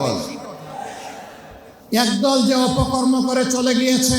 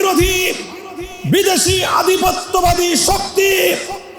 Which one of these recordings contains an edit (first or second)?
first